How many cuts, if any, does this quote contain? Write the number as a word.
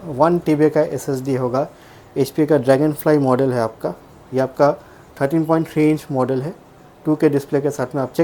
zero